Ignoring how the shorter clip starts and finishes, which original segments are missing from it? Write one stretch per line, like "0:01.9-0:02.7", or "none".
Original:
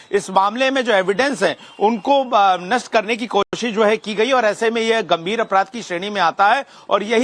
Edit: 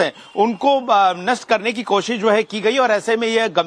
0:03.5-0:03.6